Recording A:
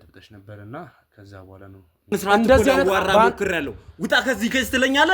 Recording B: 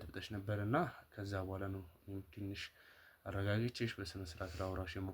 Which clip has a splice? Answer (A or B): A